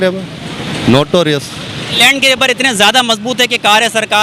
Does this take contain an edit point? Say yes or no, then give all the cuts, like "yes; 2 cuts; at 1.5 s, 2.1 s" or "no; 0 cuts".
yes; 1 cut; at 2.0 s